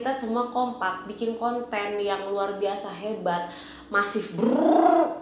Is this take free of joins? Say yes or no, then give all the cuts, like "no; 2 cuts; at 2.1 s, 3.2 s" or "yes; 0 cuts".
yes; 0 cuts